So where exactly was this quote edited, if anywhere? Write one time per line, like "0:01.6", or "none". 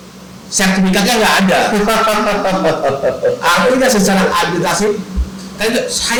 none